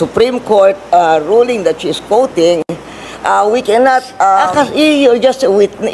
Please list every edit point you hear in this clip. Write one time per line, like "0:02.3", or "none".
0:04.5